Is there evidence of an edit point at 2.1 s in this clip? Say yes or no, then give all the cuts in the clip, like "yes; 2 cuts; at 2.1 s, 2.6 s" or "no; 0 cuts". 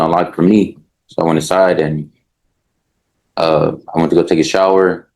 no; 0 cuts